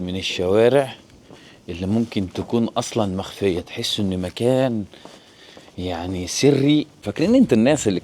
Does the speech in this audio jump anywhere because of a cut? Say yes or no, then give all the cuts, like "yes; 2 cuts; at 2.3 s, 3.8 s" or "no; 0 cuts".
yes; 1 cut; at 7.1 s